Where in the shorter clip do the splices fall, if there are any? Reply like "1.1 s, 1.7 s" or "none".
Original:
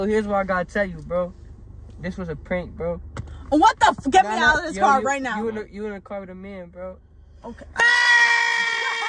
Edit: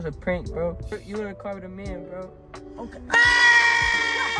1.0 s